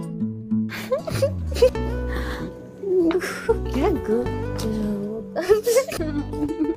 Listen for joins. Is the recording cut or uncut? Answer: uncut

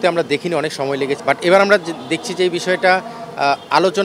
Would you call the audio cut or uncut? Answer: cut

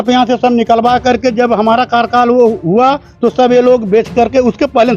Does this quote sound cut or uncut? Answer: uncut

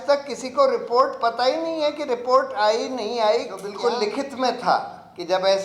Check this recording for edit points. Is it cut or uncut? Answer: cut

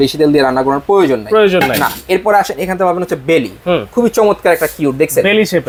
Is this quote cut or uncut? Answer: uncut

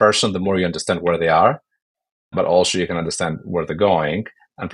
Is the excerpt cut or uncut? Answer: uncut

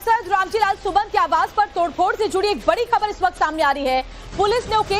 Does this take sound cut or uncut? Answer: cut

